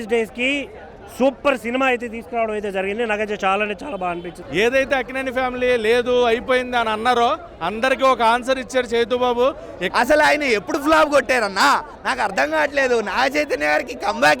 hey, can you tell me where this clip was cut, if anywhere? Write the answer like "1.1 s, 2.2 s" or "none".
4.3 s, 9.8 s